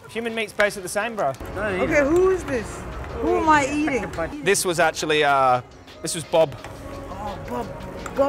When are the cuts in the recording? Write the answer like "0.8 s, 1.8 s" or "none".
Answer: 1.5 s, 4.3 s